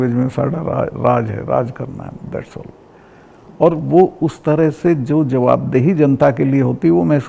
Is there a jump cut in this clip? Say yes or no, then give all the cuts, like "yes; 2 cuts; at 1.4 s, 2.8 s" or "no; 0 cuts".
no; 0 cuts